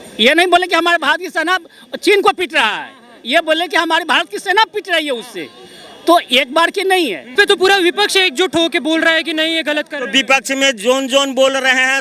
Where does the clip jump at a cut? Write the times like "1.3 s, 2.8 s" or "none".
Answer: 7.3 s